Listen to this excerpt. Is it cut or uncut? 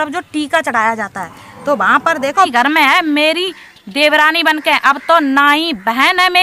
cut